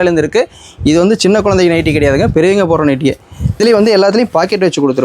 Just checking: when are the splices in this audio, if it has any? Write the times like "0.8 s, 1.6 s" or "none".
3.6 s